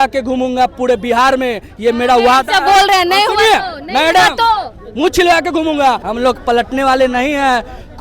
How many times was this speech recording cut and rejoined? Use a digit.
1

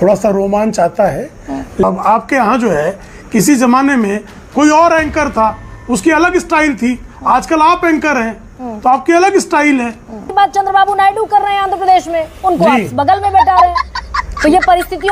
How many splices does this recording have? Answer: 2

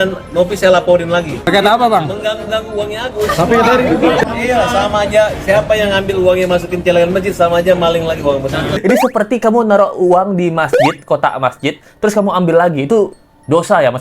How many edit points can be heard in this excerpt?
3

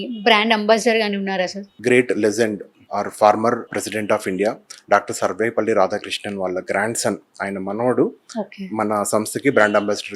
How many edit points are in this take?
3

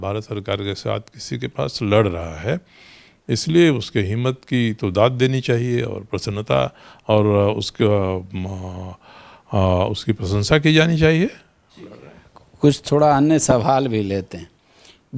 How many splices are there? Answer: 0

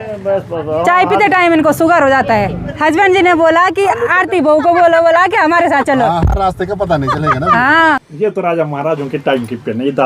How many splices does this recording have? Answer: 2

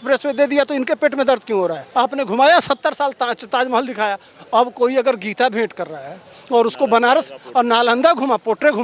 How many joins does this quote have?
1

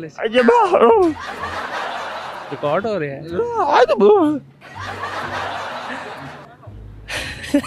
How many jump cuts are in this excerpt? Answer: 0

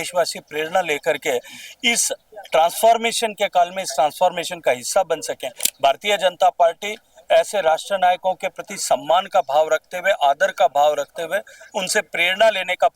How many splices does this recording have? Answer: 1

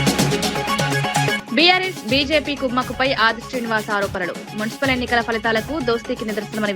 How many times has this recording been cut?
1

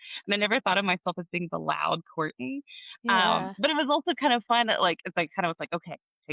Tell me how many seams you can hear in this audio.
0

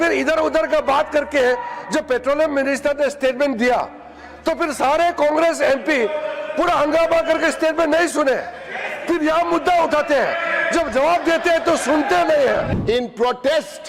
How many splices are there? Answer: 1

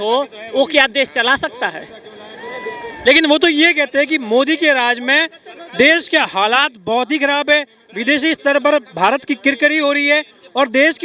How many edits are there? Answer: 0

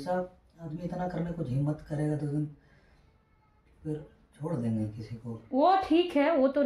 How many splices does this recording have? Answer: 0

